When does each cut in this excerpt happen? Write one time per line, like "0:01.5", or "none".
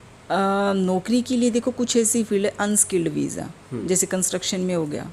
none